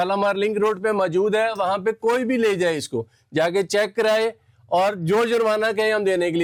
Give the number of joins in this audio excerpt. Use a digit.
0